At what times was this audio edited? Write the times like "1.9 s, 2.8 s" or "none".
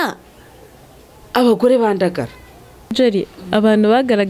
2.9 s